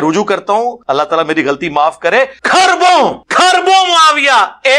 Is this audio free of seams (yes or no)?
no